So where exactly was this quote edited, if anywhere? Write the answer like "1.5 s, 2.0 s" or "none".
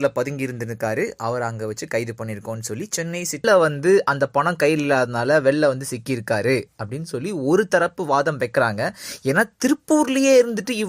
none